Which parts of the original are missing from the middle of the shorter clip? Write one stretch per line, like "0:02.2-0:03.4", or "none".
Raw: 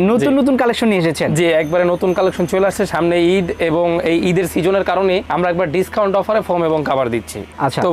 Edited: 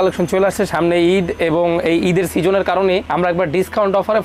none

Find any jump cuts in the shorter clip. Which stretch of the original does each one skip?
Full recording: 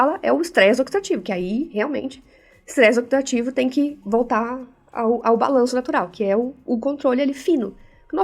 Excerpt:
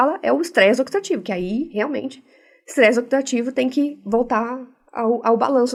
none

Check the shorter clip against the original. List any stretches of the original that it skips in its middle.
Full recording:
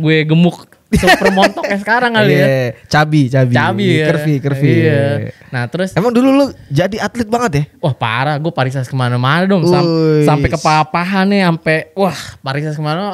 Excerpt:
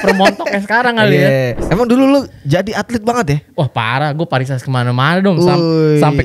0:02.8-0:05.9

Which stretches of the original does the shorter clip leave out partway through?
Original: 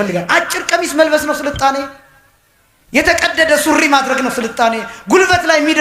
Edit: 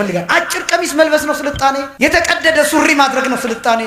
0:01.9-0:02.8

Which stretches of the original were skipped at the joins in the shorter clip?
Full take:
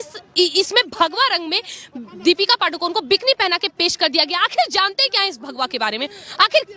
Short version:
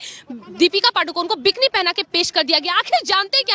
none

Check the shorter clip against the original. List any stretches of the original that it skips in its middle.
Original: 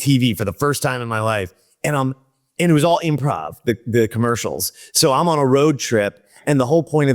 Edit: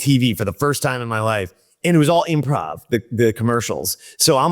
0:01.6-0:02.4

